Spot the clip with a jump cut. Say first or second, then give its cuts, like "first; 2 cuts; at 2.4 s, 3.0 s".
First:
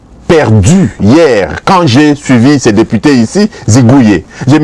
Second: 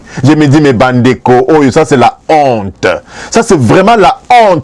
second; 1 cut; at 3.2 s